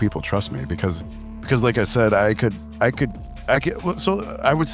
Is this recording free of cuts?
yes; 0 cuts

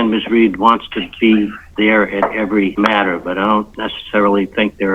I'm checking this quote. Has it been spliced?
yes; 1 cut; at 2.7 s

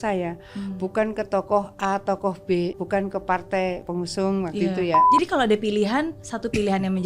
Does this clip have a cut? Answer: yes; 3 cuts; at 2.8 s, 3.8 s, 5.0 s

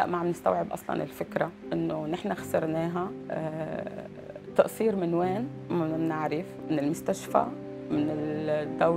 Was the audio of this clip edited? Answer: yes; 3 cuts; at 1.6 s, 3.2 s, 5.6 s

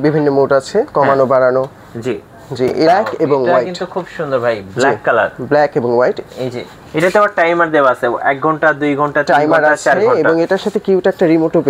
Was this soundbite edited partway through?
yes; 1 cut; at 2.9 s

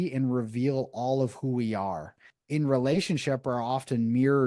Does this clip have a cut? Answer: yes; 1 cut; at 2.3 s

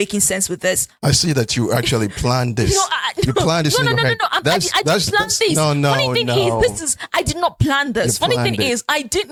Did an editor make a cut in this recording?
no; 0 cuts

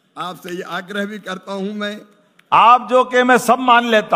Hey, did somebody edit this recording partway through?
yes; 1 cut; at 2.3 s

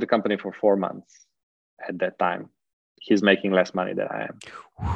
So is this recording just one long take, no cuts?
yes; 0 cuts

